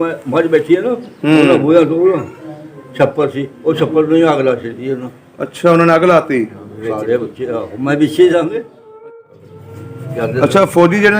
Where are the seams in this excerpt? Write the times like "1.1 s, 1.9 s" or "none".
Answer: 9.2 s